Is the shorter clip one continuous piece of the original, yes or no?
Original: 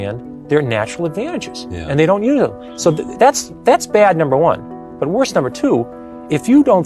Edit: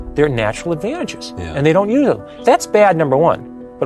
no